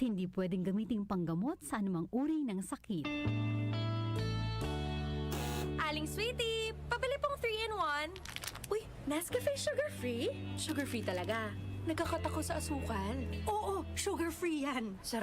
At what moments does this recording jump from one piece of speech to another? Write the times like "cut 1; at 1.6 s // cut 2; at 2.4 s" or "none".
cut 1; at 3.0 s